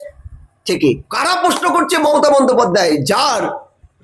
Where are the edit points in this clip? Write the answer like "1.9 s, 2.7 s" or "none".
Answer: 1.1 s